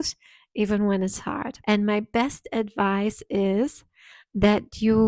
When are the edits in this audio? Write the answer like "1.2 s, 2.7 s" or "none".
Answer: 1.5 s